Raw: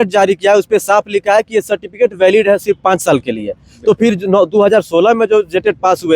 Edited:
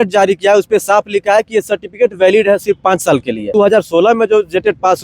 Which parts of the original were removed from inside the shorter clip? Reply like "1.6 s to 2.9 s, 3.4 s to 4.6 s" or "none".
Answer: 3.5 s to 4.5 s